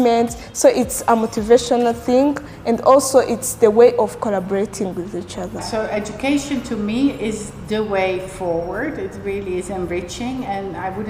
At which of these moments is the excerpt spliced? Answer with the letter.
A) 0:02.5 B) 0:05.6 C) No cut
B